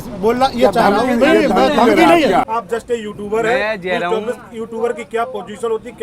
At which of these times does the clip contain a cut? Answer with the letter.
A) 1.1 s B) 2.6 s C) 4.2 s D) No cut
B